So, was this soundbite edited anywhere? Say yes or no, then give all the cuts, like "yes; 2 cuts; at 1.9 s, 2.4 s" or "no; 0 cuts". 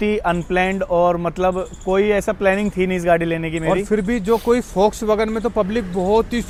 no; 0 cuts